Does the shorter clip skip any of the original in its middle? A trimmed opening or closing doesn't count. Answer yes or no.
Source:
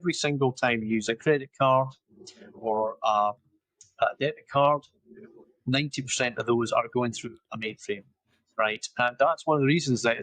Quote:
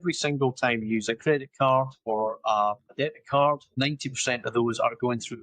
yes